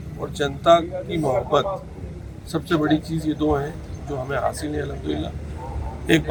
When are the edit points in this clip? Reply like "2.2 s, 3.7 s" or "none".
none